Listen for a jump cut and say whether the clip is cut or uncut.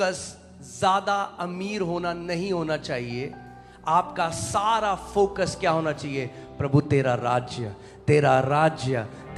uncut